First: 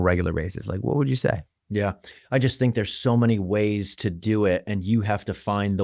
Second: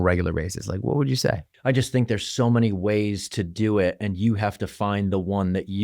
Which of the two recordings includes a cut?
second; 1 cut; at 1.5 s

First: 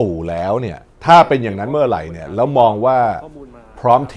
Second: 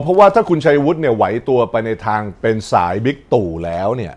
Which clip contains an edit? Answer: second; 1 cut; at 2.3 s

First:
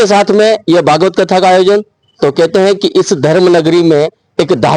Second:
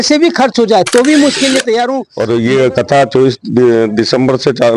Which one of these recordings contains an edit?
second; 1 cut; at 2.1 s

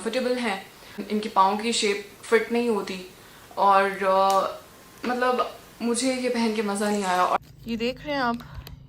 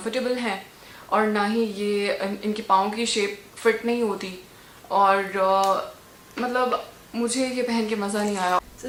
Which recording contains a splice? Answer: first; 2 cuts; at 1.0 s, 7.4 s

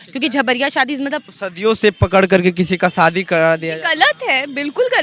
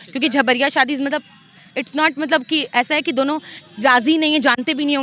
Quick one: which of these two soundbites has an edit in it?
first; 1 cut; at 1.4 s

